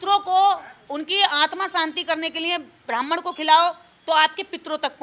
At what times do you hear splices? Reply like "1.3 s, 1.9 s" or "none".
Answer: none